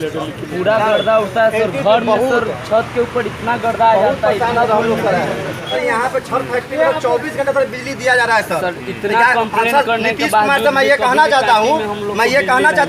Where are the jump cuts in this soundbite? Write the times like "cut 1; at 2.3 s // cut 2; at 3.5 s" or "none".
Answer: cut 1; at 5.8 s